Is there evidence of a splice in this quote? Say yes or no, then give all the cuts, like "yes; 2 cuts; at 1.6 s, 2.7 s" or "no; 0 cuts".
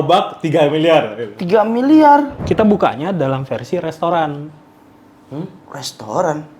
yes; 1 cut; at 2.4 s